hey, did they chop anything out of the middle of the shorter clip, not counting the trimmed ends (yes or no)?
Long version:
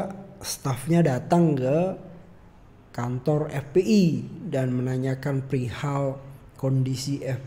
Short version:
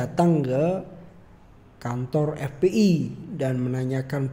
no